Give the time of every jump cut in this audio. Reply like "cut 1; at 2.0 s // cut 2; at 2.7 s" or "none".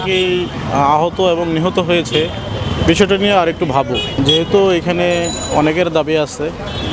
none